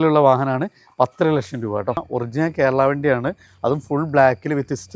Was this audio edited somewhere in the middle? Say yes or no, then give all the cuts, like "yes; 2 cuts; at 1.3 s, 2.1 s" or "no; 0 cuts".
yes; 1 cut; at 2.1 s